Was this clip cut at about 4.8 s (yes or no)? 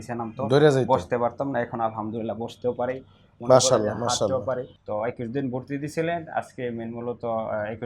yes